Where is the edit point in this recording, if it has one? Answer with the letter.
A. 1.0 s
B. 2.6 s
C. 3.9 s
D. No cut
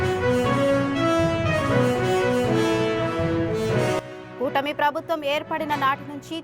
C